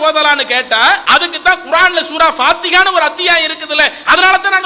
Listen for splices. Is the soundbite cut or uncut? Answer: cut